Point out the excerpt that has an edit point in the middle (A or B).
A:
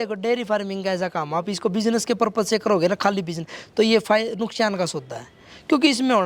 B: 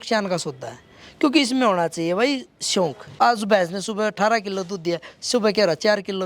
B